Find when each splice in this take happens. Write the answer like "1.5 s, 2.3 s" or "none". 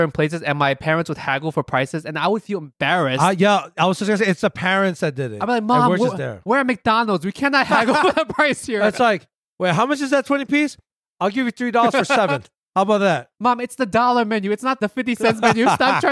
14.8 s